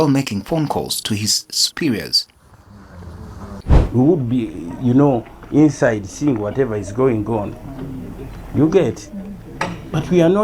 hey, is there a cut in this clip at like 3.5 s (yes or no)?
yes